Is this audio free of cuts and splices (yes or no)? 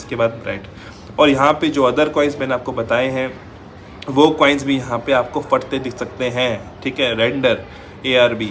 yes